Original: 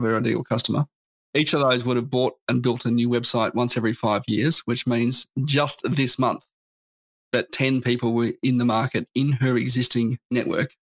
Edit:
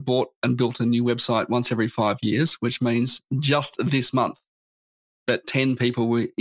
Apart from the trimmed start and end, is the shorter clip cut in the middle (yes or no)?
no